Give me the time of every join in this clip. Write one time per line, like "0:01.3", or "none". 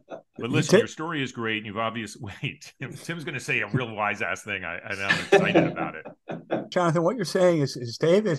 0:06.7

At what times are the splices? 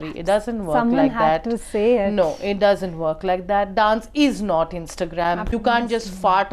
0:05.5

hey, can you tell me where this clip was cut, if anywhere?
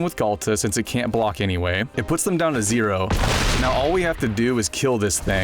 0:01.9

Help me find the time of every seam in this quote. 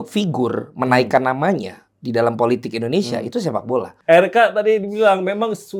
0:03.9

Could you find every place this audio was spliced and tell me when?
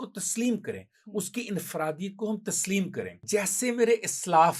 0:03.2

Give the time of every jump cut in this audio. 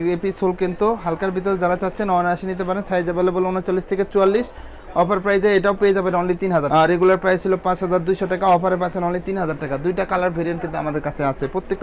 none

